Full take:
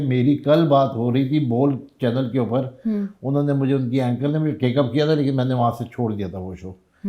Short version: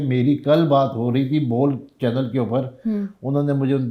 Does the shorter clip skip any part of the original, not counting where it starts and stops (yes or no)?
no